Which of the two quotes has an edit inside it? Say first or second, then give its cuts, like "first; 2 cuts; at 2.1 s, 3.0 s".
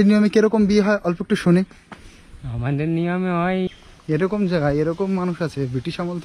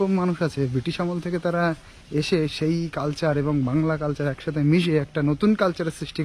first; 1 cut; at 3.9 s